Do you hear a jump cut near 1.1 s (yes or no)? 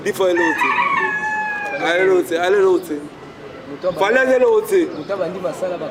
no